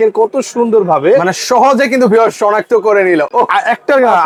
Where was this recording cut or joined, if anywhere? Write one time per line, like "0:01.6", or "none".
none